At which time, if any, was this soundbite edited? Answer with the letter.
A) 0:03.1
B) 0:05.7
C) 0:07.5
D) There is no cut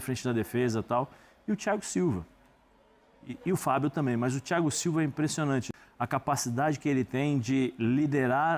B